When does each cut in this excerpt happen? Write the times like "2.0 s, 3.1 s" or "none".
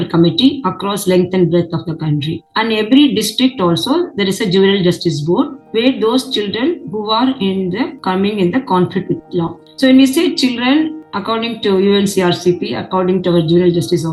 none